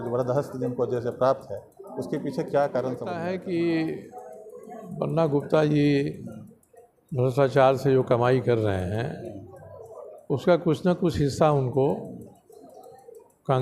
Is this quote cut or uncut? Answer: cut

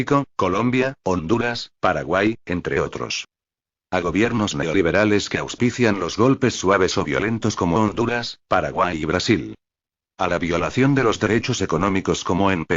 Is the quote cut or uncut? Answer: cut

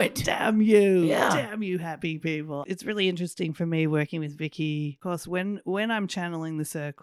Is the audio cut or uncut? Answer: cut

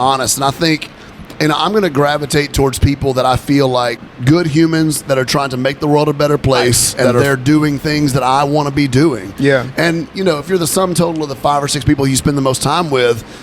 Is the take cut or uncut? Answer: cut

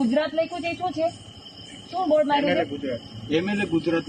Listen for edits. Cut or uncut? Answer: uncut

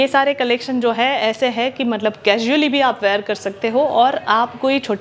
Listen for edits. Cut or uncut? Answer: uncut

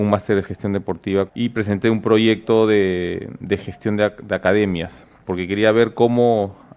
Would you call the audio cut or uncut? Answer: uncut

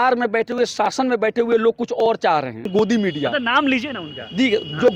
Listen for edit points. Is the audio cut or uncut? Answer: cut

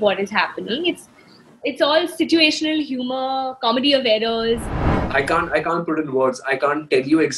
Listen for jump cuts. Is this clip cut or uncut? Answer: cut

